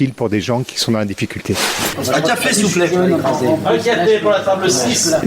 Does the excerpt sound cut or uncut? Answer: cut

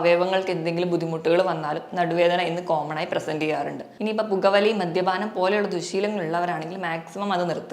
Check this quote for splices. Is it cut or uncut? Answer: cut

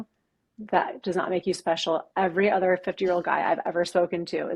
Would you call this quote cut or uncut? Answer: uncut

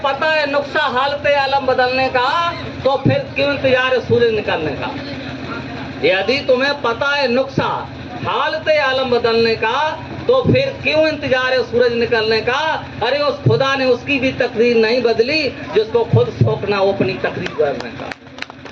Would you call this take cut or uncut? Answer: uncut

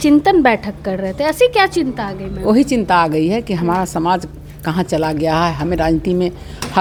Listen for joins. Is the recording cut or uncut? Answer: uncut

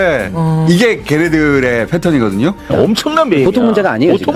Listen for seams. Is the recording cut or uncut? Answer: cut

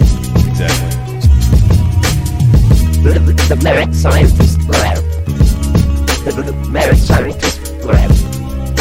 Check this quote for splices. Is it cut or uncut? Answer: uncut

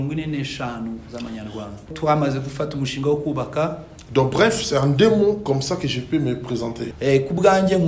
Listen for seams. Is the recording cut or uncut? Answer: cut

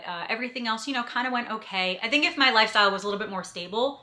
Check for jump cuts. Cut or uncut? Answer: cut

